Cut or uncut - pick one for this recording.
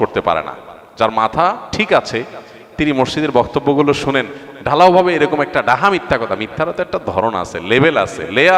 uncut